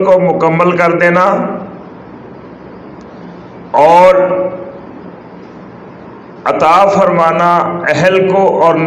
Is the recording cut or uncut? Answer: uncut